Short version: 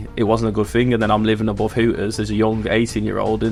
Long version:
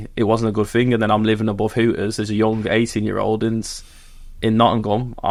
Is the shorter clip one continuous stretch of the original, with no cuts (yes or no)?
yes